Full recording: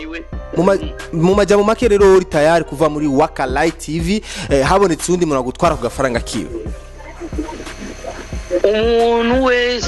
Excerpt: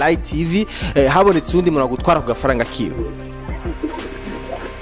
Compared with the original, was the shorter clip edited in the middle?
no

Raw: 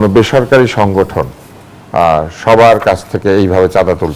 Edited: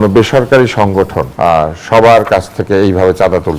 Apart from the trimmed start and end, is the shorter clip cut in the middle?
yes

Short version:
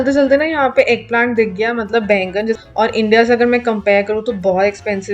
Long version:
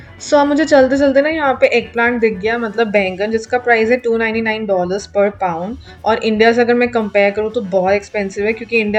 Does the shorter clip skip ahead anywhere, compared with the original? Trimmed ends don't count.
yes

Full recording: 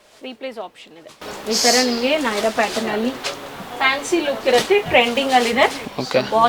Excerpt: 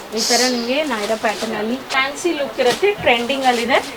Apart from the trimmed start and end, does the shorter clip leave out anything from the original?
yes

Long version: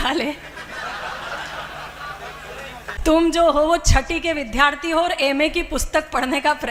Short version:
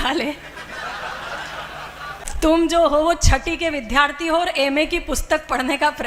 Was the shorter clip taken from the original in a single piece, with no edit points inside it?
no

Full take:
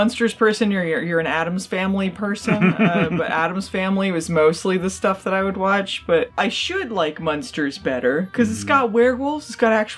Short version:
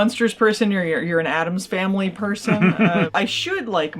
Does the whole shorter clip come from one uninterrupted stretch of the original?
no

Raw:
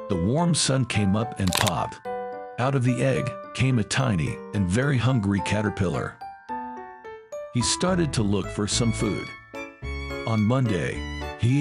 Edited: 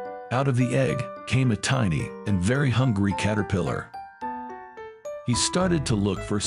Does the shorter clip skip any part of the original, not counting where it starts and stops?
no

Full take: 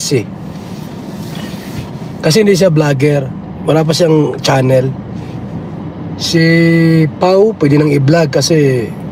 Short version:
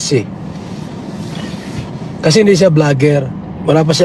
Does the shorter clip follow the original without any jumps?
yes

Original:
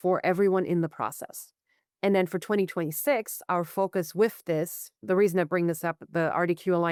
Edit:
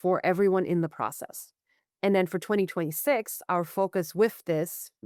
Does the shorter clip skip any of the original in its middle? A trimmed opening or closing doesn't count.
no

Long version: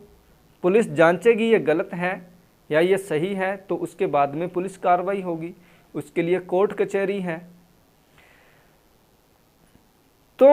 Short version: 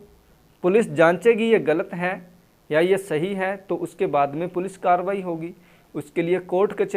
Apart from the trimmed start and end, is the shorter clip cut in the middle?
no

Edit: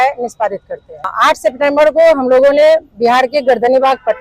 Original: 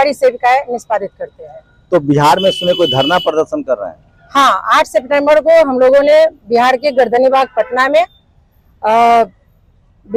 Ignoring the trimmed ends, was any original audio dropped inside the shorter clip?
yes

